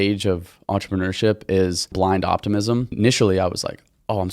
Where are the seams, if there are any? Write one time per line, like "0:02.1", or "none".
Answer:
0:01.9
0:02.9